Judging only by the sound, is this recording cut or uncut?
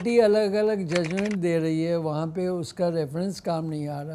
uncut